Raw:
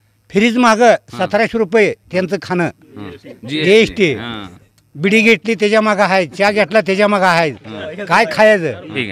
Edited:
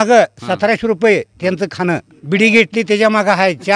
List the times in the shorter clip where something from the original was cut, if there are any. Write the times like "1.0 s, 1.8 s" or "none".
2.1 s